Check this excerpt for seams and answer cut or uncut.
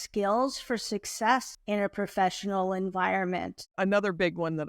cut